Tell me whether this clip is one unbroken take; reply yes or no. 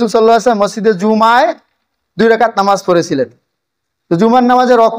yes